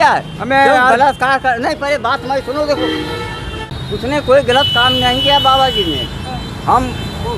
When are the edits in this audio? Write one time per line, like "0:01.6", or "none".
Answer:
0:03.8